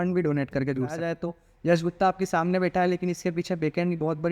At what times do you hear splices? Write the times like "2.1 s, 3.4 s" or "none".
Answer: 1.0 s